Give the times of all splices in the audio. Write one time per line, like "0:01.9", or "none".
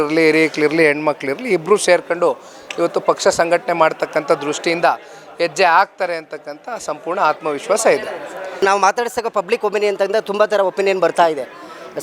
0:08.6